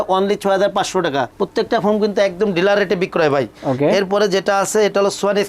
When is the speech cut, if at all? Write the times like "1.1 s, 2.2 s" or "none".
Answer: none